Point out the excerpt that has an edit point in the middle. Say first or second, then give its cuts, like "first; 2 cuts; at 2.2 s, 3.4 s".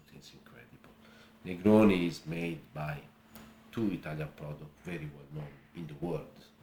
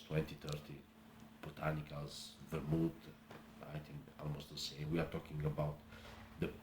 second; 1 cut; at 4.9 s